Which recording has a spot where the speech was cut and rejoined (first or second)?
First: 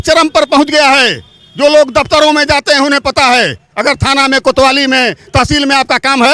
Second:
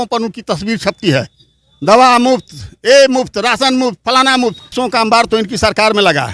second